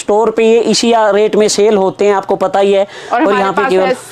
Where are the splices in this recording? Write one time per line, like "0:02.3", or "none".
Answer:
none